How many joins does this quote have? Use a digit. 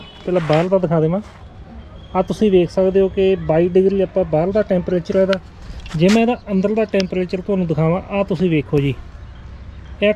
0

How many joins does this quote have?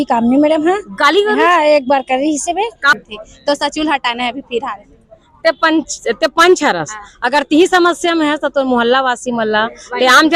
1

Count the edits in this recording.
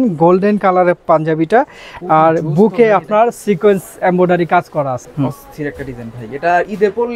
1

